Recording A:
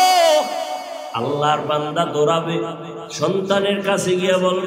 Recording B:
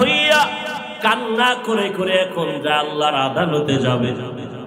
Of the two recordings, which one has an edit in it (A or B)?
A